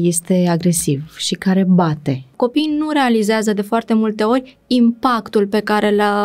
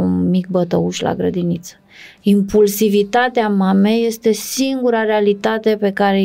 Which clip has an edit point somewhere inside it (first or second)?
first